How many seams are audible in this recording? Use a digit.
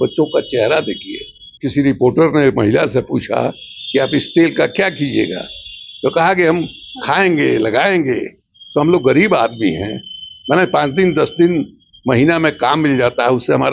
1